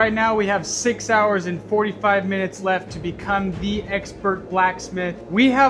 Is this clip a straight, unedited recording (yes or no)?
yes